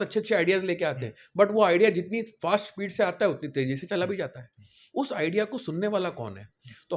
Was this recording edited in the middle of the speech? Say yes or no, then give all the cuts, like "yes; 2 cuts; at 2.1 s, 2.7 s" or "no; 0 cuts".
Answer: no; 0 cuts